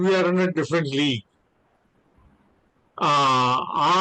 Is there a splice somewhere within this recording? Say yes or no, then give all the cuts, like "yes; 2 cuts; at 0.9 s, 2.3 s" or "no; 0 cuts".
no; 0 cuts